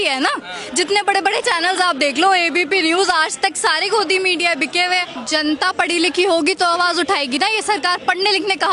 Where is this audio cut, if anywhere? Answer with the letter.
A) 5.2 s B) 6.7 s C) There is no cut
A